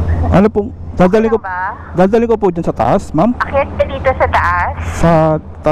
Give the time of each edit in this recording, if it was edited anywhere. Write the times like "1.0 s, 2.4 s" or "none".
none